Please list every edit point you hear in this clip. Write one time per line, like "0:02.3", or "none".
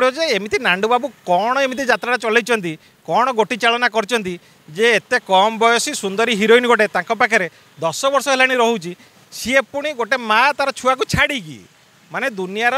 none